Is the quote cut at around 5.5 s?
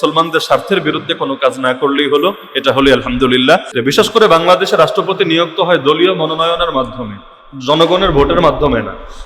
no; 1 cut; at 3.8 s

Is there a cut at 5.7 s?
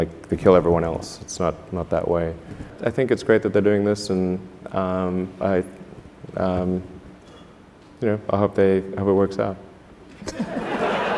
no; 1 cut; at 2.7 s

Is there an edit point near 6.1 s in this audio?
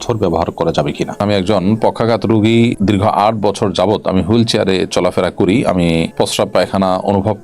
yes; 3 cuts; at 1.2 s, 2.8 s, 6.1 s

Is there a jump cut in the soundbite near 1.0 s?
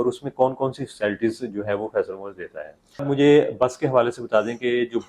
no; 1 cut; at 3.0 s

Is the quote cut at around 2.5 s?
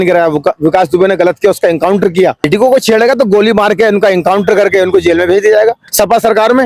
yes; 2 cuts; at 2.5 s, 5.9 s

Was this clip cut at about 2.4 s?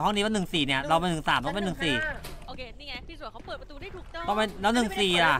yes; 1 cut; at 2.4 s

